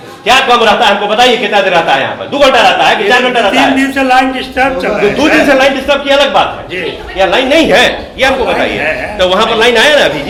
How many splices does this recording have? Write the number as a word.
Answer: zero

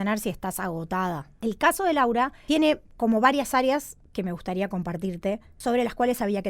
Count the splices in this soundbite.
four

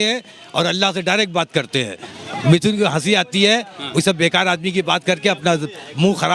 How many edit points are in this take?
one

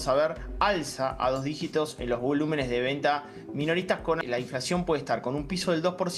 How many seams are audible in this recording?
one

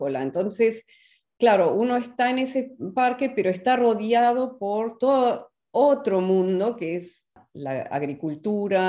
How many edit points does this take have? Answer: one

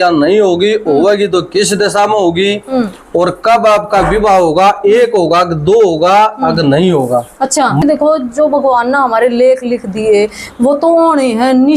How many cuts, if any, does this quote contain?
one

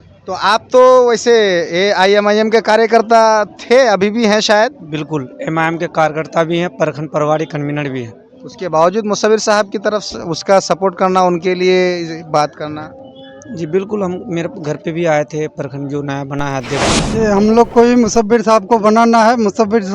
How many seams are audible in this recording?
one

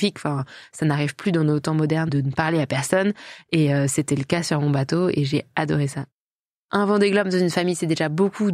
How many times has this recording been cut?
one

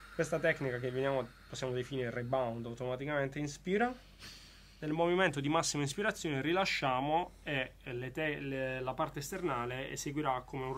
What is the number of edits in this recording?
zero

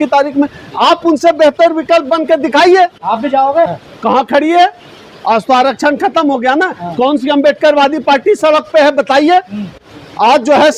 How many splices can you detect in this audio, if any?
one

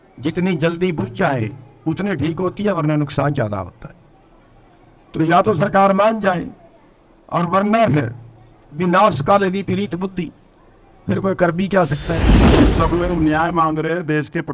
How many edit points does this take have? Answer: one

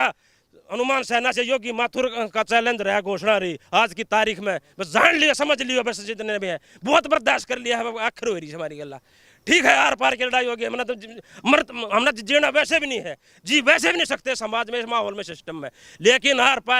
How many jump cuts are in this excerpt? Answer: zero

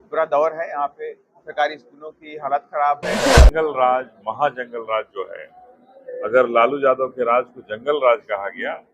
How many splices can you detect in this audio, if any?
one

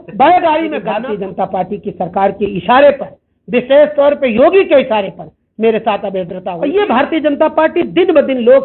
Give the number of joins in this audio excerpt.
two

